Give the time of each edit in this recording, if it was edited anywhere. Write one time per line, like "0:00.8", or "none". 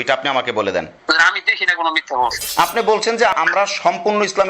0:01.0
0:02.4
0:03.3